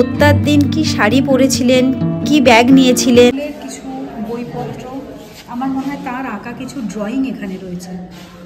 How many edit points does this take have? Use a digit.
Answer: 1